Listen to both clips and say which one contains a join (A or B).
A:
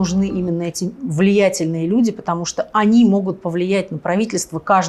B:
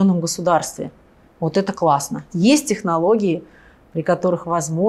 B